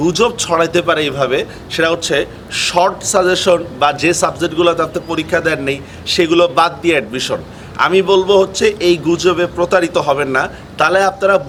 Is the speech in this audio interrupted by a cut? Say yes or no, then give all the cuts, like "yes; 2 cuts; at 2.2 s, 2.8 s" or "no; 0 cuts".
no; 0 cuts